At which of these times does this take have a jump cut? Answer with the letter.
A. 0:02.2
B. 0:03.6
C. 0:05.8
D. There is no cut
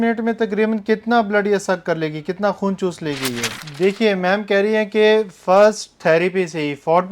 B